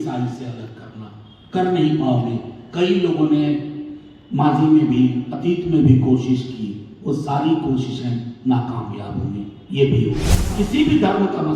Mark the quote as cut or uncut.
cut